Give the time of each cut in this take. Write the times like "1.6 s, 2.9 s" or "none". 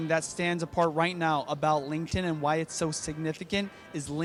none